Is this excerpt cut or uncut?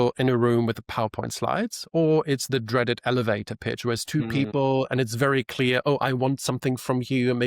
uncut